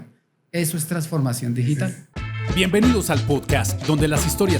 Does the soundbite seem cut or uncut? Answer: cut